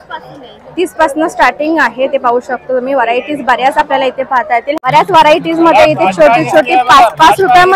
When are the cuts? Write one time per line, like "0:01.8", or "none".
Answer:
0:04.7